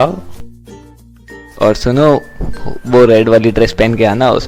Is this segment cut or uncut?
uncut